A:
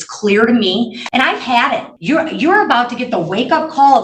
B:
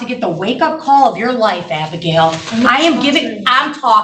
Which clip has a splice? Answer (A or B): A